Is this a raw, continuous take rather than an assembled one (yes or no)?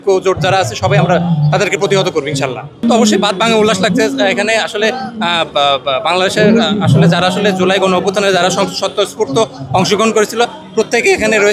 yes